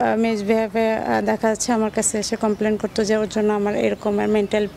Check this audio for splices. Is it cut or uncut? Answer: uncut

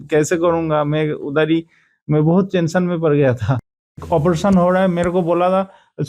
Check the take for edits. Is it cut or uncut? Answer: cut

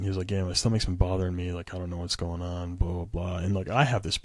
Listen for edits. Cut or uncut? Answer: uncut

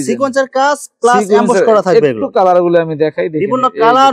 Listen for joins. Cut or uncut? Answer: uncut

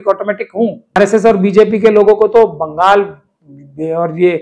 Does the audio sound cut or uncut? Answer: cut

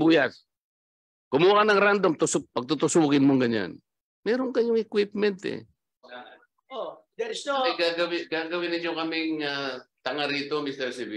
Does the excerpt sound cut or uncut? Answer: cut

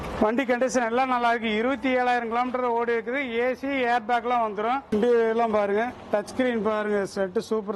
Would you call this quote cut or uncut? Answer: uncut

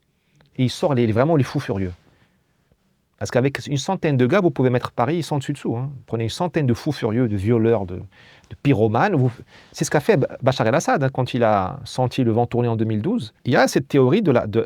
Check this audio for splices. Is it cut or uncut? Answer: cut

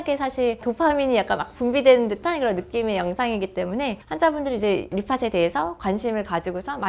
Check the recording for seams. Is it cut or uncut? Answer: uncut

